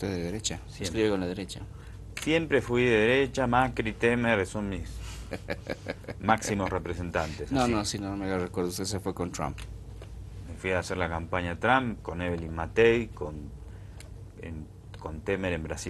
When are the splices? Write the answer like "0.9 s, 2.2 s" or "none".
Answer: 5.5 s